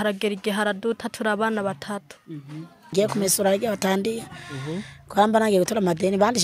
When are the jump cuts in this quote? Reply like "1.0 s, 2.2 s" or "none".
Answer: 2.9 s